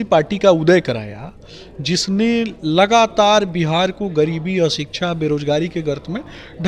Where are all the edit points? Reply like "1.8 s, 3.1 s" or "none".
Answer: none

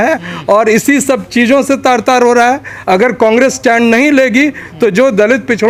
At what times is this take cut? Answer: none

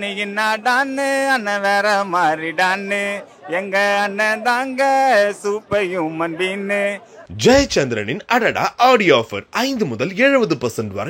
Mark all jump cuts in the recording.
7.1 s

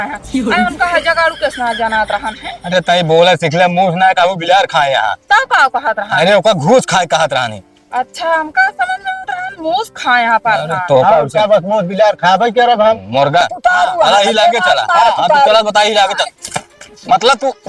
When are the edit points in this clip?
13.5 s

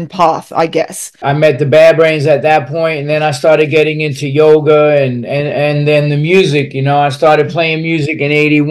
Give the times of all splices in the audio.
1.1 s

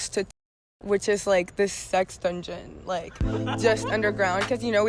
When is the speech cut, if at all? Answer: none

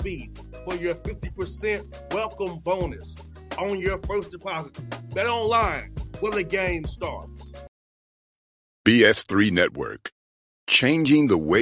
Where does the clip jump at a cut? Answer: 7.6 s

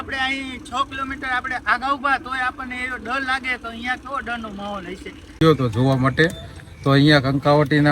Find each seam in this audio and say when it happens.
5.2 s

